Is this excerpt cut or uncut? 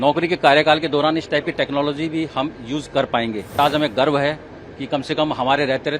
cut